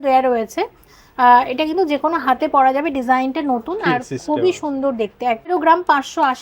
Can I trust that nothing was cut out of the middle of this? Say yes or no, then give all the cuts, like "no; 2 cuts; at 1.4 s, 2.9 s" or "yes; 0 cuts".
no; 1 cut; at 5.5 s